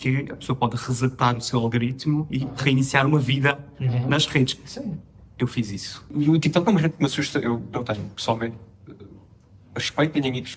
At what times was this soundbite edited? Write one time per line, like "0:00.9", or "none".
0:06.1